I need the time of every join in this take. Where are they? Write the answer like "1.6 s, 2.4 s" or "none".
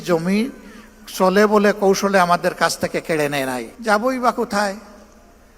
3.7 s